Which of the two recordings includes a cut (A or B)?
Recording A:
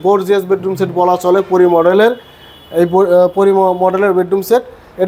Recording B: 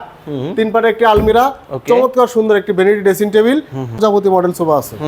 B